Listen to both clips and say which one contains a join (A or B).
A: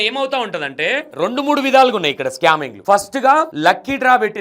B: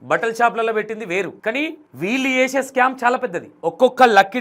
A